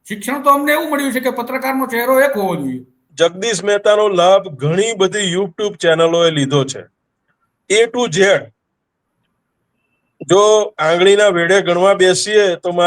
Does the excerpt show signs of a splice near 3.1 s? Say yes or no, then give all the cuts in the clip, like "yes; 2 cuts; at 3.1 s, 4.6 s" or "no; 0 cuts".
yes; 1 cut; at 3.1 s